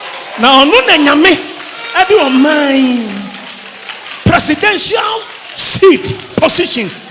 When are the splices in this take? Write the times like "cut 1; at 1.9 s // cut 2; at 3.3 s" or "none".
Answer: none